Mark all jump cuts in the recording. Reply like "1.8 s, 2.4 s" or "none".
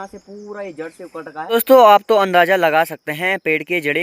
1.5 s

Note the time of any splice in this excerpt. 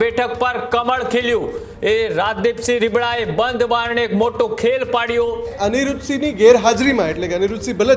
1.6 s, 5.6 s

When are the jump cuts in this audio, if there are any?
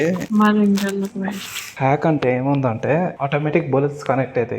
1.6 s

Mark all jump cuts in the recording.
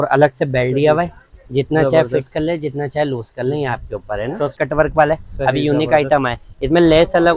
4.6 s

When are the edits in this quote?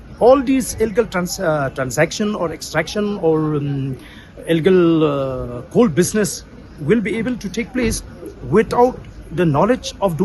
none

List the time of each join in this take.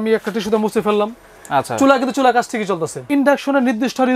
3.0 s

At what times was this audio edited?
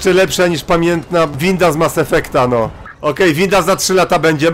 1.4 s, 2.8 s

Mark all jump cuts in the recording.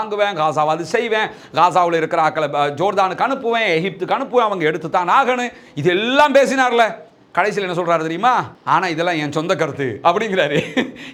none

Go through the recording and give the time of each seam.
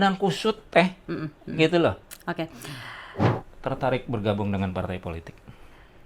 3.3 s

